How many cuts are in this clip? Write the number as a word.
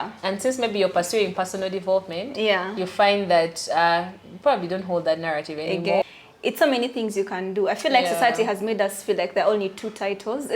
one